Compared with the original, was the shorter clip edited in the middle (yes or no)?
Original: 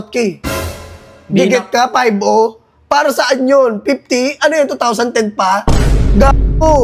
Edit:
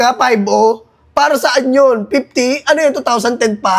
no